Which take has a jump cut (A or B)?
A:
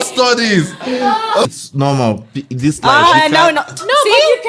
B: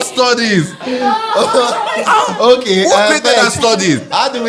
A